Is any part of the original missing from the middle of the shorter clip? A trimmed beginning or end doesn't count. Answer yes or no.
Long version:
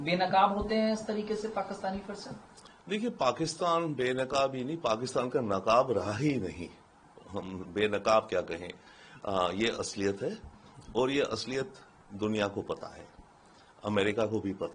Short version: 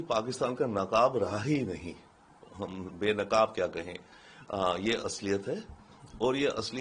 no